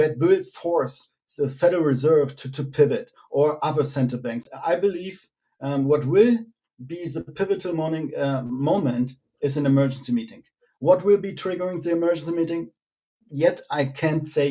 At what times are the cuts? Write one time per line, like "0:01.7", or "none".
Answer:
0:04.4